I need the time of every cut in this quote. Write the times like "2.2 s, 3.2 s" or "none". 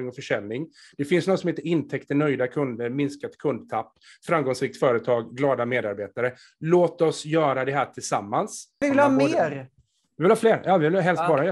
8.8 s